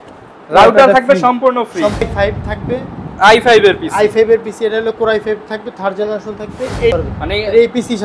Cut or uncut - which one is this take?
cut